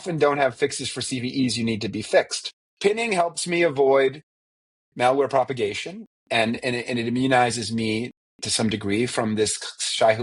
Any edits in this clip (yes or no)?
yes